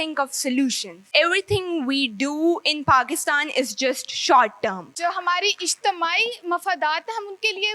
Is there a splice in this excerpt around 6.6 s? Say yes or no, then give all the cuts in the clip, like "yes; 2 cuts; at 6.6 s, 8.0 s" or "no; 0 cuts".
no; 2 cuts; at 1.0 s, 4.9 s